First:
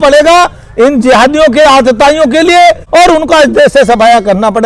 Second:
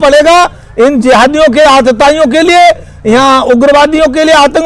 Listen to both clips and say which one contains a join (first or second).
first